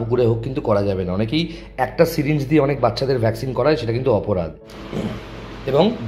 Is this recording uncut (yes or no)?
no